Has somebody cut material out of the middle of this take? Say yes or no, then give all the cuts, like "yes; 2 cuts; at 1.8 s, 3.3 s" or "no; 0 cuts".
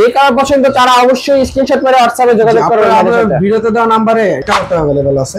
yes; 1 cut; at 4.4 s